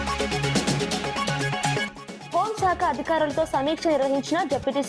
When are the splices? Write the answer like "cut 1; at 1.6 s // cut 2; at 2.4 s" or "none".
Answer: cut 1; at 1.8 s